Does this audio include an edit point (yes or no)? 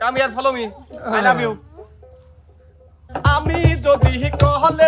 yes